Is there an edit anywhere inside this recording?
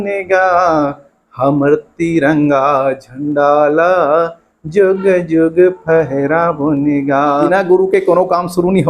yes; 1 cut; at 7.5 s

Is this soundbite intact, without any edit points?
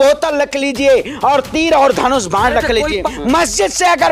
no; 1 cut; at 3.1 s

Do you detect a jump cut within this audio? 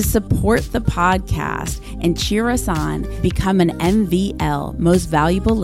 no; 0 cuts

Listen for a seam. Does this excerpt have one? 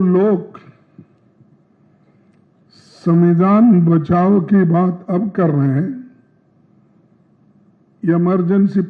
no; 0 cuts

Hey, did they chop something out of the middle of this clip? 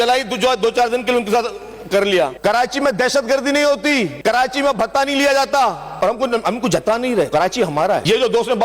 yes; 4 cuts; at 2.3 s, 4.1 s, 5.9 s, 7.4 s

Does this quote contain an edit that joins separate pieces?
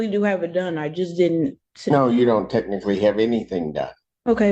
no; 0 cuts

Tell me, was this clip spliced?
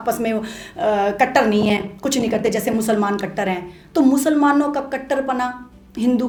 no; 0 cuts

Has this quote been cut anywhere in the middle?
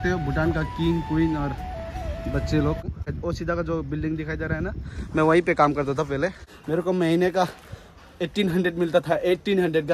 yes; 2 cuts; at 2.9 s, 6.5 s

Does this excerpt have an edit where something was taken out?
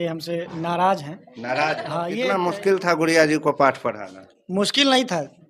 yes; 1 cut; at 2.1 s

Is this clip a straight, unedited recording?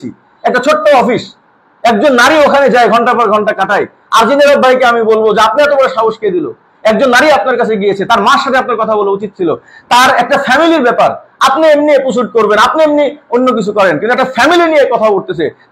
yes; 0 cuts

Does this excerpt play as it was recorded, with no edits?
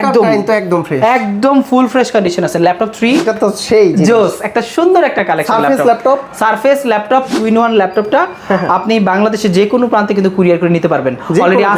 no; 2 cuts; at 3.3 s, 7.3 s

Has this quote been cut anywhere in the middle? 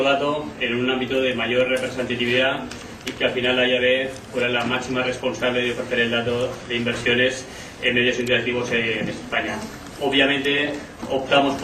yes; 1 cut; at 3.1 s

